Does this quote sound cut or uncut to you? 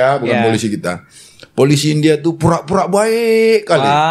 uncut